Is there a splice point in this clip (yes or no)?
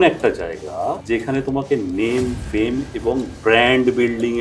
yes